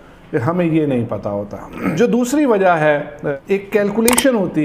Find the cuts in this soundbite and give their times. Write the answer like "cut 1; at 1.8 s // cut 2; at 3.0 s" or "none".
cut 1; at 1.9 s // cut 2; at 3.2 s